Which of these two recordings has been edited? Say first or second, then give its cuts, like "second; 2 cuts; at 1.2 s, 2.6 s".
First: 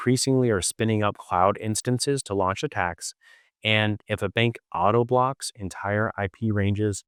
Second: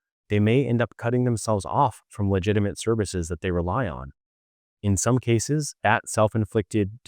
second; 1 cut; at 5.7 s